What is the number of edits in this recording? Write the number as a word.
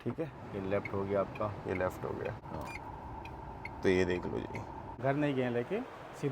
two